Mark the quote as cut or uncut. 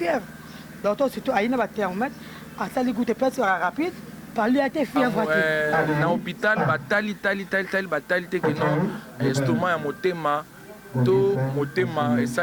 cut